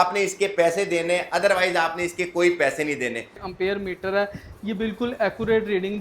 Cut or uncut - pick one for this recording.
cut